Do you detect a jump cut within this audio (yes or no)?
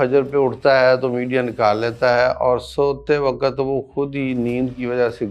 no